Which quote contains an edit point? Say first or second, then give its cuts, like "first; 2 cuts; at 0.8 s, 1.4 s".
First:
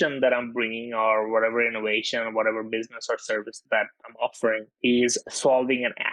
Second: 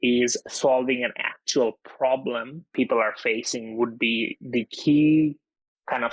first; 1 cut; at 3.6 s